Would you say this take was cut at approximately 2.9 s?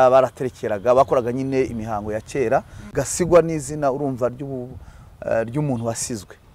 yes; 1 cut; at 2.9 s

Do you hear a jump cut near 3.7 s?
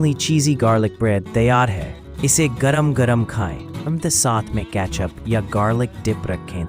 yes; 1 cut; at 3.7 s

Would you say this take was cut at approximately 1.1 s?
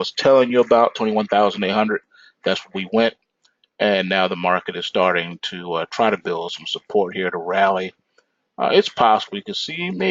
yes; 1 cut; at 1.1 s

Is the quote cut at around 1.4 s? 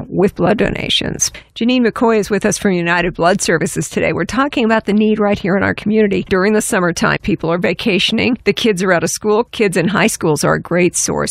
yes; 2 cuts; at 1.4 s, 6.2 s

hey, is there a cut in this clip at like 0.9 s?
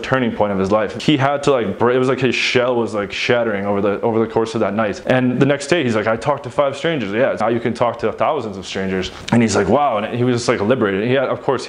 yes; 2 cuts; at 0.9 s, 7.4 s

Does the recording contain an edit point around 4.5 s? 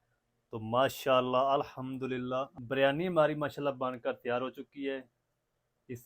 no; 1 cut; at 2.5 s

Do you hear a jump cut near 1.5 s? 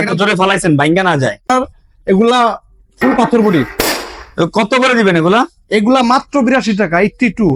yes; 1 cut; at 1.5 s

